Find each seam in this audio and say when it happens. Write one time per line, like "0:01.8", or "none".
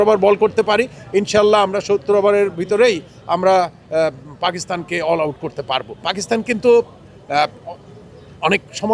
0:06.1